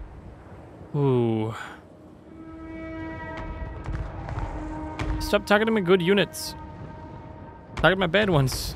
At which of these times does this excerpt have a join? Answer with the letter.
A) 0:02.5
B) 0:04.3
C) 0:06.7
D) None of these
A